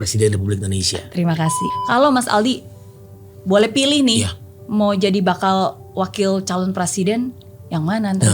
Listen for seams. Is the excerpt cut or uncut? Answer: cut